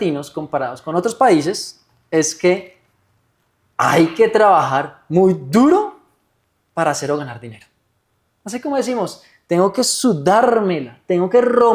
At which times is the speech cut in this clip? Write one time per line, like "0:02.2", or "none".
none